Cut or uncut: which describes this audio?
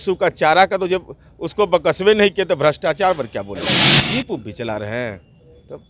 cut